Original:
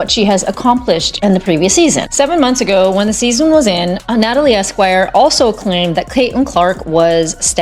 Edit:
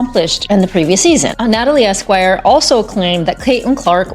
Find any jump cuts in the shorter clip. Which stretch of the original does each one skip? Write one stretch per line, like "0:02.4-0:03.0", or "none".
0:02.1-0:04.0